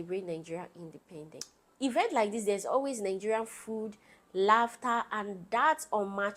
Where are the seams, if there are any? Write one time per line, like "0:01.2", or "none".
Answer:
none